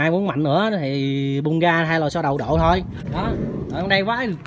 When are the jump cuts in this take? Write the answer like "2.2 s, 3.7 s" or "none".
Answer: 3.0 s